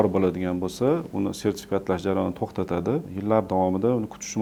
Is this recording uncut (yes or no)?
yes